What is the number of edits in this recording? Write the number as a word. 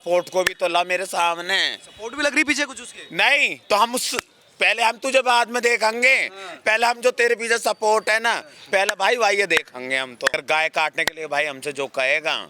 one